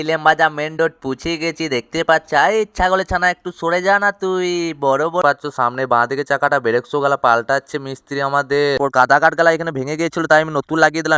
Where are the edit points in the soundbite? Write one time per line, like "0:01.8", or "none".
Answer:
0:05.2
0:08.8